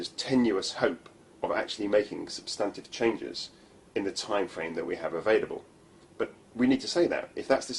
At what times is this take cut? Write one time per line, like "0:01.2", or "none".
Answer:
0:03.3